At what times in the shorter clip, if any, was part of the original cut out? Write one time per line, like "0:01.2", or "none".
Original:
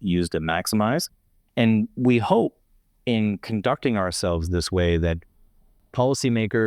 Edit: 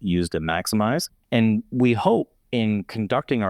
0:01.1
0:02.4